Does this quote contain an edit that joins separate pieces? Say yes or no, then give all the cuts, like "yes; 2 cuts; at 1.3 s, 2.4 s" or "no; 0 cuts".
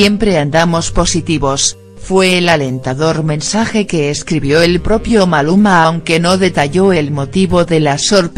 no; 0 cuts